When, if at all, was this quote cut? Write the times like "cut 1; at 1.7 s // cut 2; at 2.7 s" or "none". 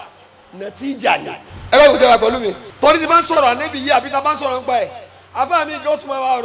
cut 1; at 1.5 s // cut 2; at 2.7 s